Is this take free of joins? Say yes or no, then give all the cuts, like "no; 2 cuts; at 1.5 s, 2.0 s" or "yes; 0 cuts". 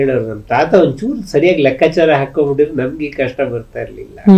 yes; 0 cuts